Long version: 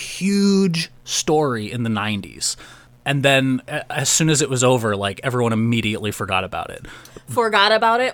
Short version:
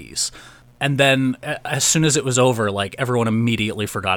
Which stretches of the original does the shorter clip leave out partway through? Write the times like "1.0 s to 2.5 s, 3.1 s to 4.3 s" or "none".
none